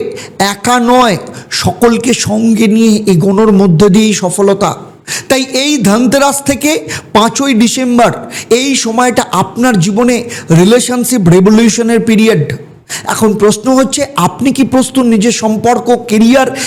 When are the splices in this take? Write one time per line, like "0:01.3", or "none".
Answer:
none